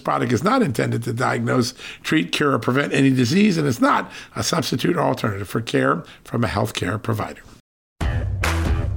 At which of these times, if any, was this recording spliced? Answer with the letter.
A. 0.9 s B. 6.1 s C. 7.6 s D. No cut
C